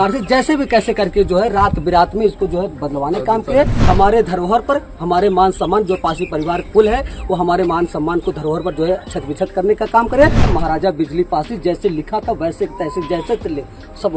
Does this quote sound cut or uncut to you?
cut